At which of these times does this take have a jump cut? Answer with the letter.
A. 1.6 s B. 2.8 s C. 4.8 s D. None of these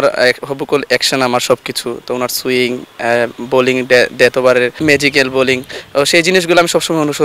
C